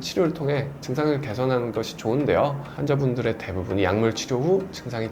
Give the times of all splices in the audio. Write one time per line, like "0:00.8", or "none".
0:02.7